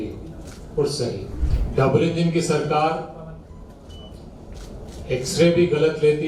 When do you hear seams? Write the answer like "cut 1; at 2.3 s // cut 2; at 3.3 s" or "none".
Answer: cut 1; at 1.5 s